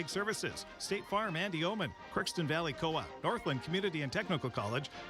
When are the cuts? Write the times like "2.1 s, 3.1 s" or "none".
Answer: 2.0 s